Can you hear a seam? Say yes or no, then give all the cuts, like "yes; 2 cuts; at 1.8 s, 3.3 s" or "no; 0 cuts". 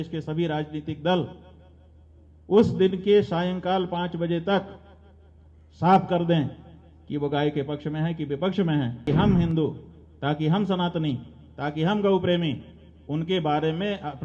yes; 1 cut; at 9.0 s